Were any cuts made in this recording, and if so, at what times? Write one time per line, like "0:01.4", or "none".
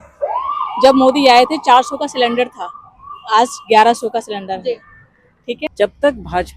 0:05.7